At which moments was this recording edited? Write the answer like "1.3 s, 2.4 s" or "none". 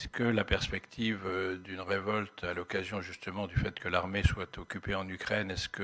none